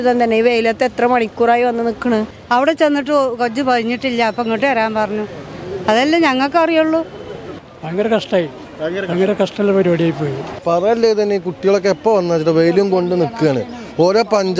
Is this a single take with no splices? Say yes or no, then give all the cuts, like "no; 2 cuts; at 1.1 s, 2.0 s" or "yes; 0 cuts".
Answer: no; 2 cuts; at 2.3 s, 10.5 s